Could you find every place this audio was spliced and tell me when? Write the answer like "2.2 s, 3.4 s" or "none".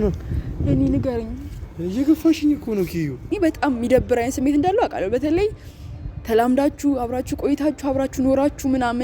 3.3 s